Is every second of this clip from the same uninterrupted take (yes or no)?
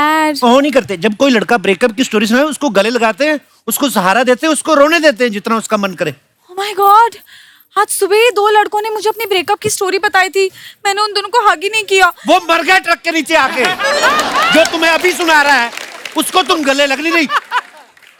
yes